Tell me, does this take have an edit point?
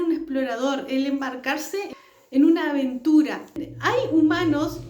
yes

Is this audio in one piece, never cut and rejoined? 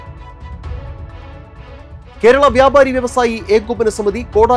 no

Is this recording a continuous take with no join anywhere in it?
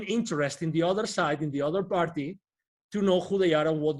yes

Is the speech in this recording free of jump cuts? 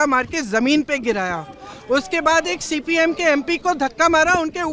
yes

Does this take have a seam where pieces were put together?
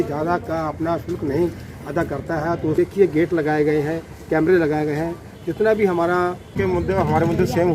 yes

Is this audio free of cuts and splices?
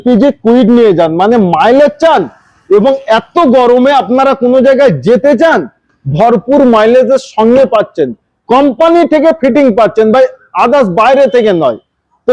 yes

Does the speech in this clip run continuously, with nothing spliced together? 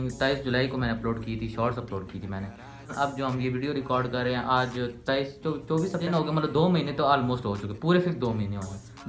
no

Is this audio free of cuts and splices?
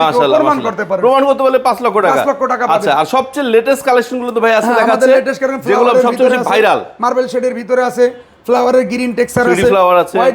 yes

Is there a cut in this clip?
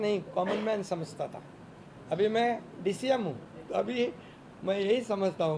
yes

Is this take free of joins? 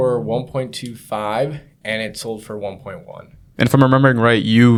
yes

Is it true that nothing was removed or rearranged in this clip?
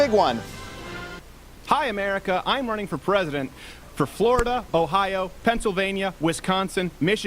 no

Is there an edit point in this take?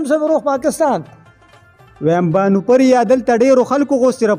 no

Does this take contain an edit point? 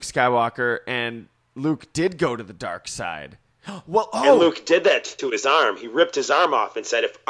no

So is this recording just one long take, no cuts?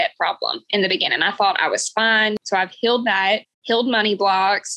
no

